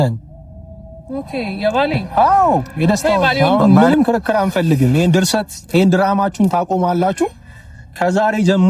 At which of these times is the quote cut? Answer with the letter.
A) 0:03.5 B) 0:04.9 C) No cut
A